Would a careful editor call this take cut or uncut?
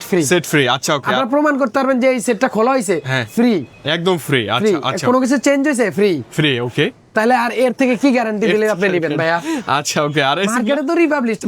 uncut